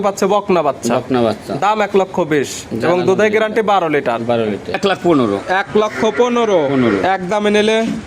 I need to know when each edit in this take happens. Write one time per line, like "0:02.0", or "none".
0:04.7